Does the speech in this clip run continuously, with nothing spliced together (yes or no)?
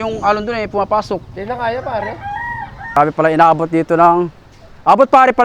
no